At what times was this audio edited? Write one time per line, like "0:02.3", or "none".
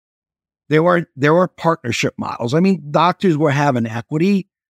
none